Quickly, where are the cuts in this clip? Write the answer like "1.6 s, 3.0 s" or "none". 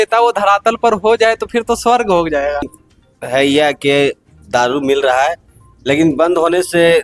2.8 s